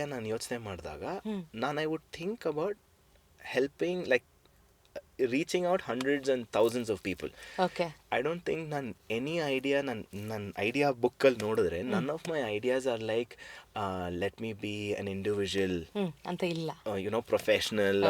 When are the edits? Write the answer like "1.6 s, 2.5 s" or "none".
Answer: none